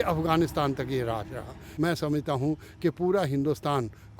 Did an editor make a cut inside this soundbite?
yes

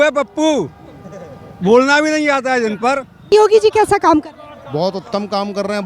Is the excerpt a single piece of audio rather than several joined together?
no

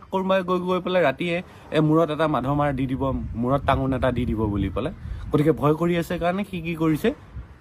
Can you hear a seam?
no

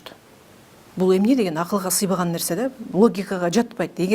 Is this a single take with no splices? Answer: yes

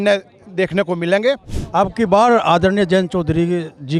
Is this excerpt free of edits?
no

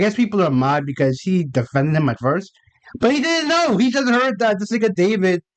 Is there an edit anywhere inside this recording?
no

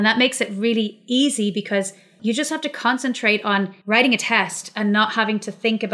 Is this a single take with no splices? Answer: no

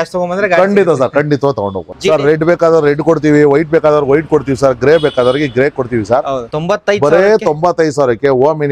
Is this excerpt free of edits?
no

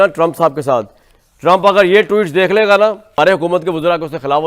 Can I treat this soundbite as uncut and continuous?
no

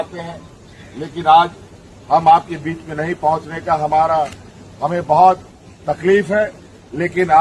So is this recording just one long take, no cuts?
yes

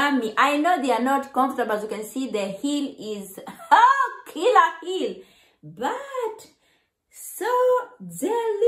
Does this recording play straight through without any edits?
yes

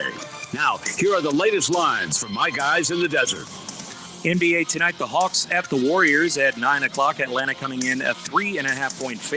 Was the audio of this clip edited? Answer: yes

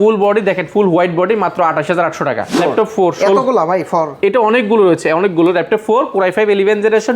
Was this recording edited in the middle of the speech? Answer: yes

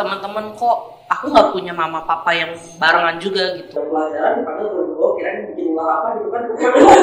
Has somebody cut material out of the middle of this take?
yes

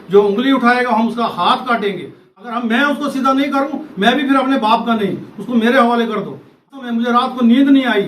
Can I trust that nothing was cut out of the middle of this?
no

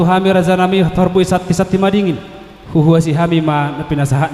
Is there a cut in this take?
no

